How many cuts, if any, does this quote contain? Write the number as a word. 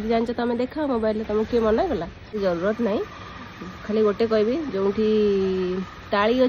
one